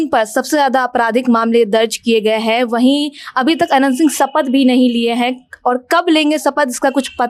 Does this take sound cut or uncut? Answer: uncut